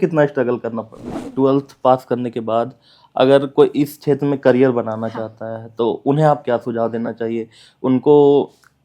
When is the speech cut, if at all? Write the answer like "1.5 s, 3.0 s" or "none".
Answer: 1.2 s